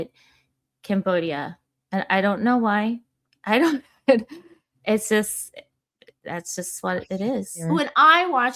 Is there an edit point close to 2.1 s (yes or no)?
no